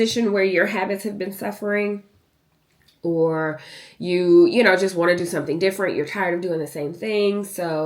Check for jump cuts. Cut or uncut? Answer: uncut